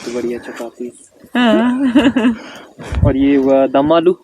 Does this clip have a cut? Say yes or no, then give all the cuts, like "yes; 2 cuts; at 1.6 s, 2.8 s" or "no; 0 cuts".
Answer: no; 0 cuts